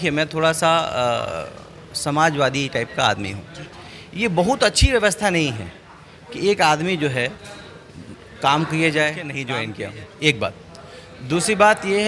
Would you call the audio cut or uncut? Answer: cut